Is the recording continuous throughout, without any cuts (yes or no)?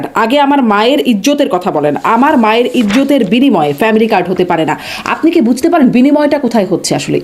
yes